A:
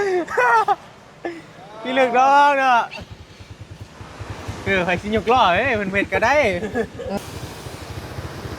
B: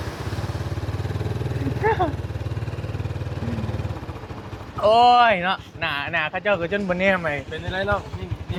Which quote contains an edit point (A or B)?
A